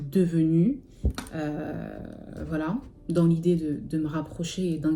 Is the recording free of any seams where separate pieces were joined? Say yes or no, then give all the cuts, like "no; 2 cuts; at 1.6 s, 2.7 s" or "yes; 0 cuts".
yes; 0 cuts